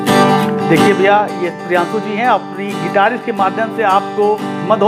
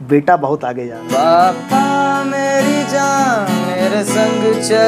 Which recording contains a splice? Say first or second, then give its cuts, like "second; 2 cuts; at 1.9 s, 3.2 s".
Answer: second; 1 cut; at 1.0 s